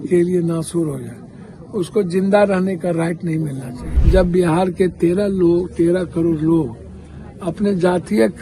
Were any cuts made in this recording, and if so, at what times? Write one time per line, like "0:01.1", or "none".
0:03.9